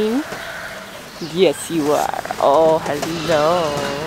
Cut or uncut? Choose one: uncut